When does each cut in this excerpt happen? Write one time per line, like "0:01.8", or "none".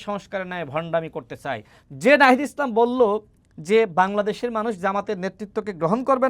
0:01.7

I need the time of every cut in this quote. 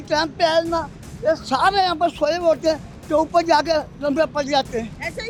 none

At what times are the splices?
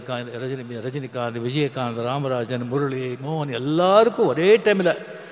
none

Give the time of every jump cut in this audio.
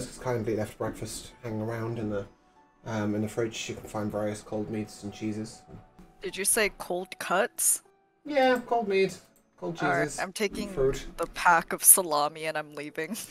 0:06.0

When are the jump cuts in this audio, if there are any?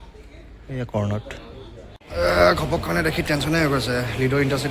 0:02.0

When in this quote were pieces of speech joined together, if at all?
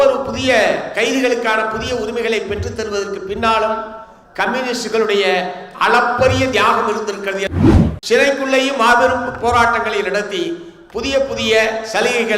0:07.5

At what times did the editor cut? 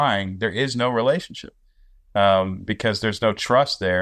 none

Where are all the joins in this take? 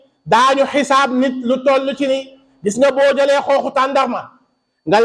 none

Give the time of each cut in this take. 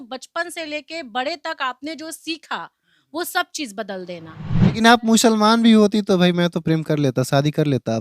0:04.6

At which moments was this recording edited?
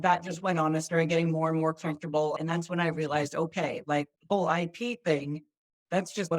0:02.3

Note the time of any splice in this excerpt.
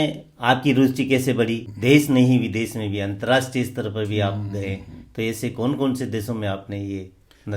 0:01.7

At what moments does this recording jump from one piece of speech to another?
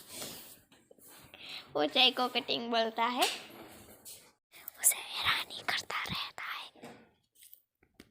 0:04.4

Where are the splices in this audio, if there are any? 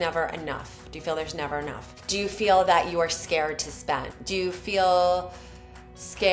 0:01.9
0:04.1

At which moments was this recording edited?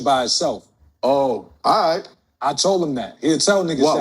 0:00.9

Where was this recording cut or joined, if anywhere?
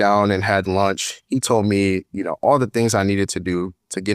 none

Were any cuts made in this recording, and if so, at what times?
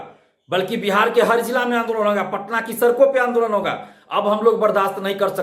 none

